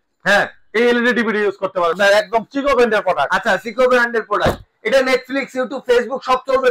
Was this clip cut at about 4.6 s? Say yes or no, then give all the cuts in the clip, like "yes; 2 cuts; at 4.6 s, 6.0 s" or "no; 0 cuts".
no; 1 cut; at 2.0 s